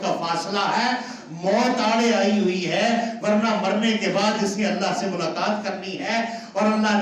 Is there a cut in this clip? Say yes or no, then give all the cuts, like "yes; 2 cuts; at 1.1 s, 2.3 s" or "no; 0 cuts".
no; 0 cuts